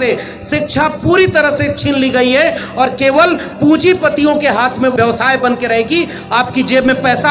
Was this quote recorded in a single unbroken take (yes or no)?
no